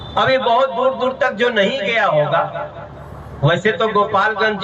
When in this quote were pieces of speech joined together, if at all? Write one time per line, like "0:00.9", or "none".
none